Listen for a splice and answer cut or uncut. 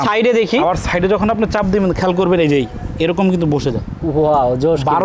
uncut